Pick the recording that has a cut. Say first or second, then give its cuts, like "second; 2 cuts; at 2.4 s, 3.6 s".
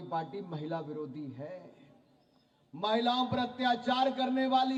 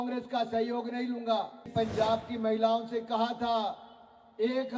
second; 1 cut; at 1.7 s